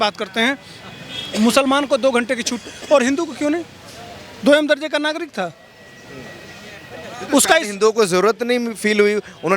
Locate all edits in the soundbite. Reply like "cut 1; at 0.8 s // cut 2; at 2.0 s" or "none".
none